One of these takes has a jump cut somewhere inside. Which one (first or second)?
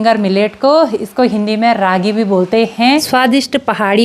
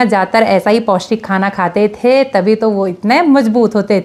first